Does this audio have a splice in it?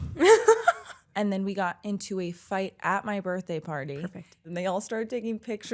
yes; 2 cuts; at 1.0 s, 4.5 s

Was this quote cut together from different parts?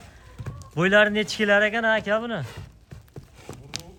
no; 0 cuts

